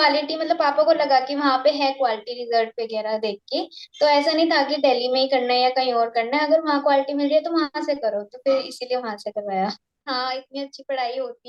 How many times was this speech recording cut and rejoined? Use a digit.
1